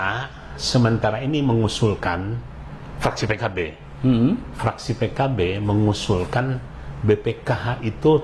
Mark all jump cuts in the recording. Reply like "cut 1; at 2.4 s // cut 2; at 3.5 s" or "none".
none